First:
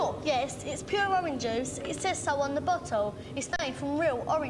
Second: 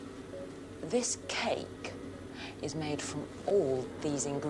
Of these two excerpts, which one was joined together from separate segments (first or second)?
second